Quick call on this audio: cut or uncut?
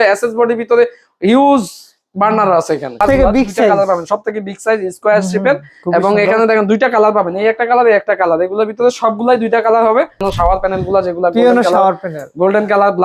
cut